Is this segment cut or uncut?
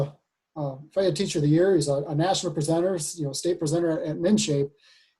uncut